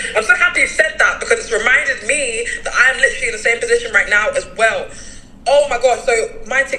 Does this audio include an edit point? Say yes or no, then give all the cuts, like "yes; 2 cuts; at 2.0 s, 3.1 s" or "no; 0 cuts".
no; 0 cuts